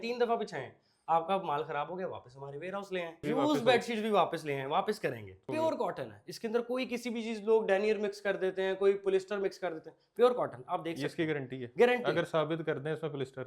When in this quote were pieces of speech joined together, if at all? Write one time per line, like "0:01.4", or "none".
0:03.2
0:05.5